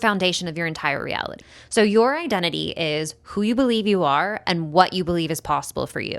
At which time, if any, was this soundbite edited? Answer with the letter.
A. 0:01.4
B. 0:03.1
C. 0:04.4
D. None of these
A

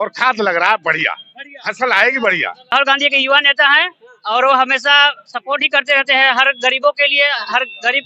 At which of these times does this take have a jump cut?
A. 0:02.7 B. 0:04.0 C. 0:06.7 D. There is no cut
A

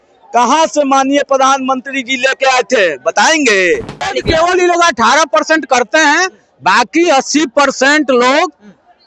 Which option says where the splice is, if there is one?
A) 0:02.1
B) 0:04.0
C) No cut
B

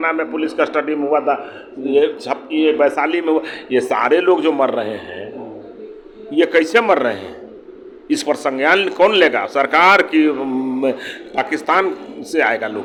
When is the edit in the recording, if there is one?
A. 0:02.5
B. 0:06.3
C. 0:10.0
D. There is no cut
D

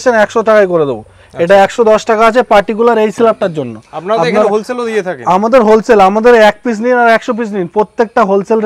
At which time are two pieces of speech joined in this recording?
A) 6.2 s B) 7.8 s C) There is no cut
C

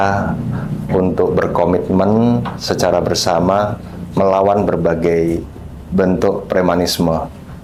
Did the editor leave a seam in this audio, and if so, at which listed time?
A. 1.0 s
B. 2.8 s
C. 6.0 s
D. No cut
D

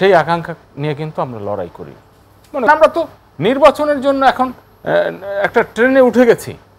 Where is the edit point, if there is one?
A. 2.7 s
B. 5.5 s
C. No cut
A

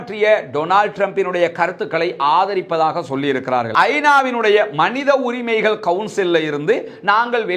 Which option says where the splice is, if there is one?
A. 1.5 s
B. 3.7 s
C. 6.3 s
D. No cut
B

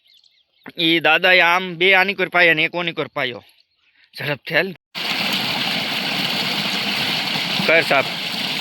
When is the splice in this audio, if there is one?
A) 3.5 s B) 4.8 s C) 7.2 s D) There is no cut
B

